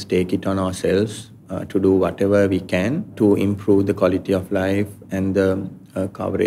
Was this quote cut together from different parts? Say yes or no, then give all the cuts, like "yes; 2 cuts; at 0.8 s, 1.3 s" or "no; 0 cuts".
no; 0 cuts